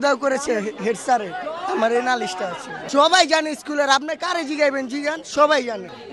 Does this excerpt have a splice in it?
no; 0 cuts

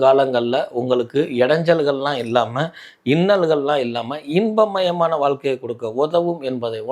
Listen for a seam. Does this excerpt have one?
no; 0 cuts

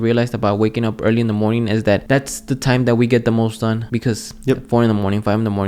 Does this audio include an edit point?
yes; 2 cuts; at 2.0 s, 3.8 s

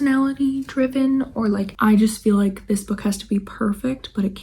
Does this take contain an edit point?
yes; 1 cut; at 1.7 s

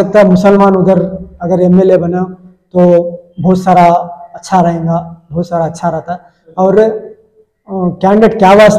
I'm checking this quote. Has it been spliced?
no; 0 cuts

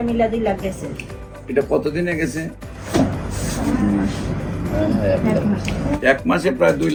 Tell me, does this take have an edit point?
no; 0 cuts

